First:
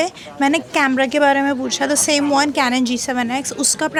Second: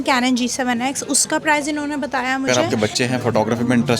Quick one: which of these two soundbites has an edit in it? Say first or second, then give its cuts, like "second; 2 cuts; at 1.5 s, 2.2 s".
second; 1 cut; at 2.5 s